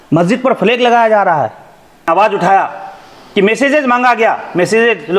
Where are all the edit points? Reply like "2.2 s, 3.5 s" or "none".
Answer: 2.1 s